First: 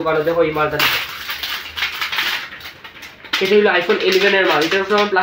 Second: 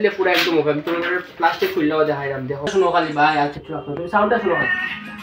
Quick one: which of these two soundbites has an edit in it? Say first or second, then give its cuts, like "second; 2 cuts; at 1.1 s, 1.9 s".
second; 1 cut; at 2.7 s